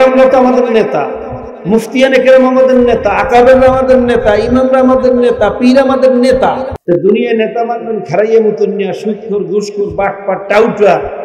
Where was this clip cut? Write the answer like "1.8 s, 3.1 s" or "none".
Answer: 6.7 s